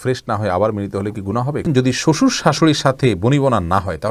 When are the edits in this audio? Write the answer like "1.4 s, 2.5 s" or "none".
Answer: 1.6 s